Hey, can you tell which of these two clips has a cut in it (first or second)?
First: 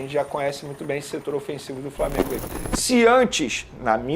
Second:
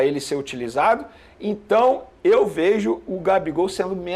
first